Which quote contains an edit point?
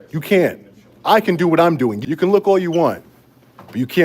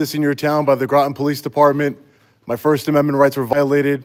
first; 1 cut; at 2.0 s

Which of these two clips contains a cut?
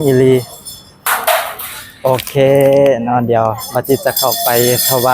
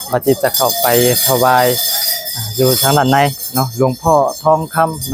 first; 1 cut; at 0.9 s

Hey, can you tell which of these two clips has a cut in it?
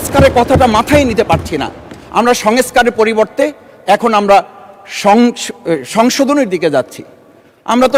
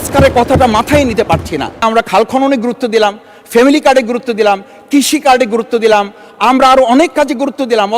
second; 1 cut; at 1.8 s

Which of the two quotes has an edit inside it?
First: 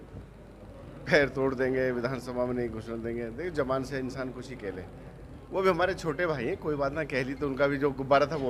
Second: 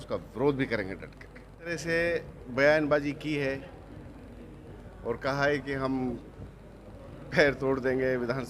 second; 1 cut; at 1.7 s

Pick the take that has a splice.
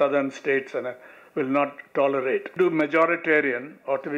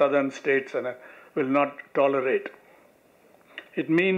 first; 1 cut; at 2.5 s

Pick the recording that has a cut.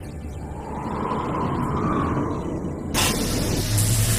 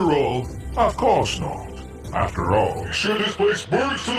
second; 1 cut; at 3.0 s

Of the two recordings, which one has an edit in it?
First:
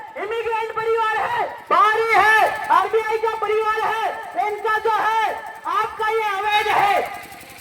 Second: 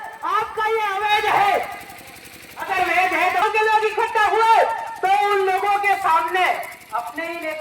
second; 1 cut; at 3.4 s

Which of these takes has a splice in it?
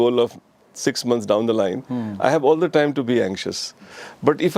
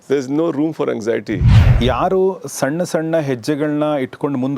second; 1 cut; at 1.5 s

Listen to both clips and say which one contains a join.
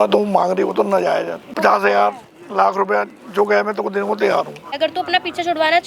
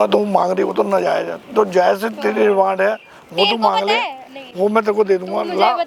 first; 2 cuts; at 1.4 s, 4.7 s

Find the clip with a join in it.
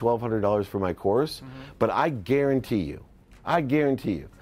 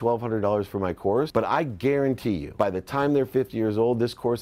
second; 2 cuts; at 1.3 s, 2.5 s

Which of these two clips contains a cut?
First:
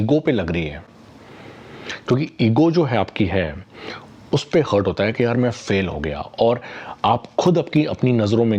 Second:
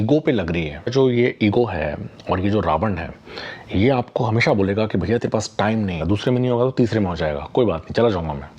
second; 2 cuts; at 0.9 s, 6.0 s

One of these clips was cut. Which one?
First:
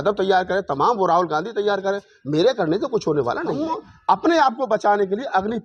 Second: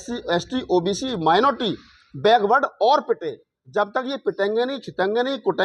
first; 1 cut; at 3.6 s

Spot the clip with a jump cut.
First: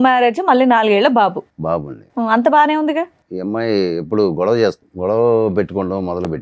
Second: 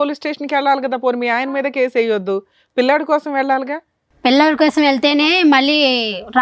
first; 2 cuts; at 3.2 s, 4.9 s

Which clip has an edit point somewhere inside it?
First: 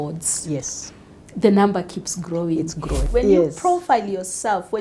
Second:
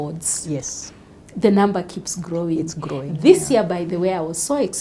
first; 1 cut; at 3.0 s

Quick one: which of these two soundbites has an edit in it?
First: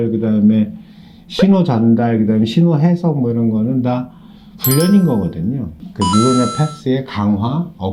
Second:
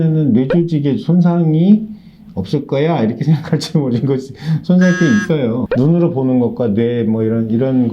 second; 1 cut; at 5.6 s

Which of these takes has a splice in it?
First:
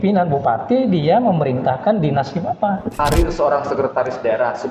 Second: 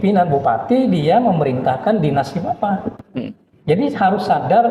first; 1 cut; at 2.9 s

